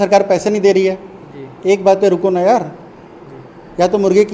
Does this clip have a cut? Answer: no; 0 cuts

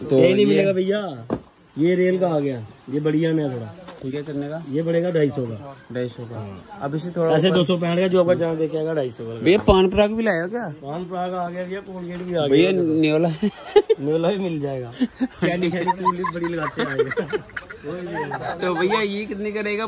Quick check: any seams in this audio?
no; 0 cuts

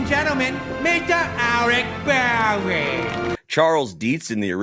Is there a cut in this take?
yes; 1 cut; at 3.3 s

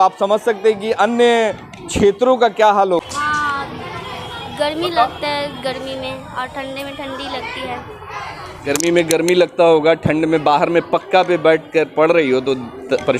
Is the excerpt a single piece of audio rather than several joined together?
no; 1 cut; at 3.0 s

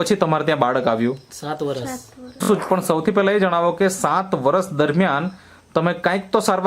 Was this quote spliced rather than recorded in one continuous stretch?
yes; 1 cut; at 2.4 s

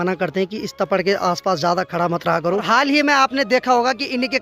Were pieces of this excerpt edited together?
yes; 1 cut; at 2.6 s

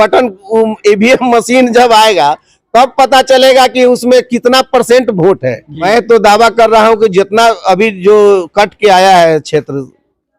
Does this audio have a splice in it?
yes; 1 cut; at 5.8 s

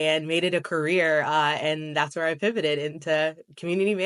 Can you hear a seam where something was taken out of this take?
no; 0 cuts

